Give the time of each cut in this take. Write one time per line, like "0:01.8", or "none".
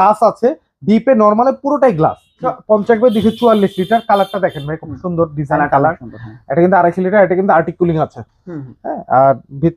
0:02.5